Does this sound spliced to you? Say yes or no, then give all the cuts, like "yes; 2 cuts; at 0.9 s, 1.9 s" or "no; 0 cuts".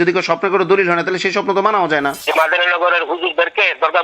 yes; 1 cut; at 2.2 s